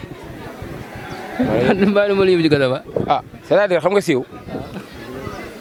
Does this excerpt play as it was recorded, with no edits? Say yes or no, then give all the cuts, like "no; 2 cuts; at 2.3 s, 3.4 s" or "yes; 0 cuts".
yes; 0 cuts